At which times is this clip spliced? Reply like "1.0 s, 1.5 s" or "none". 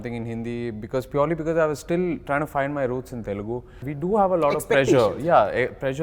3.8 s